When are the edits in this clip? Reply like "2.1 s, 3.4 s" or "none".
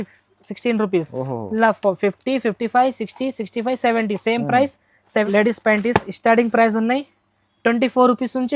5.3 s